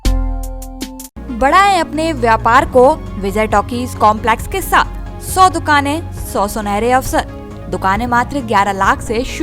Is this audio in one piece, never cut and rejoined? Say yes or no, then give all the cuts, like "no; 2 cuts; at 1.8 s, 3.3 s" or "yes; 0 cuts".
yes; 0 cuts